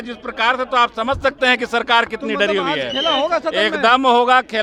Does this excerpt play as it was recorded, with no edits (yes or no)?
yes